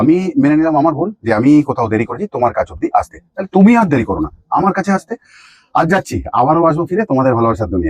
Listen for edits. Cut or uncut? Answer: uncut